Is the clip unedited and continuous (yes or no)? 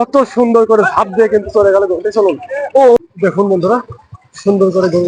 no